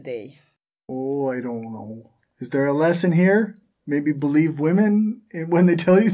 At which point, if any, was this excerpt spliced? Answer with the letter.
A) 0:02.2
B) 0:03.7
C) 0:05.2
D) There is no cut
D